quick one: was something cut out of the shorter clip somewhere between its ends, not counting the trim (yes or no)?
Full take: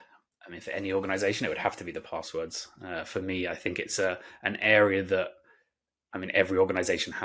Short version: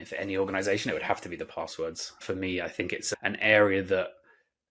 yes